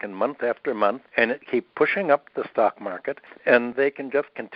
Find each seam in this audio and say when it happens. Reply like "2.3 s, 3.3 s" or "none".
1.2 s, 3.6 s